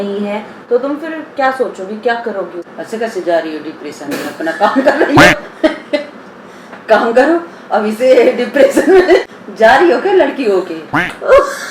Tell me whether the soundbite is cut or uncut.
cut